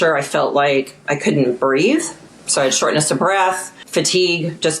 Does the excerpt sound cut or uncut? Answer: cut